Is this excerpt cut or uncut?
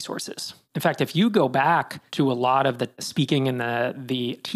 cut